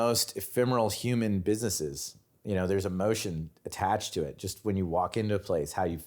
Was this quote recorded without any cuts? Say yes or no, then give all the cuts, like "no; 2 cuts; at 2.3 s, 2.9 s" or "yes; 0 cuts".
yes; 0 cuts